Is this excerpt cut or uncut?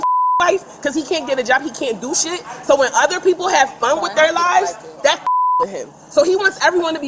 uncut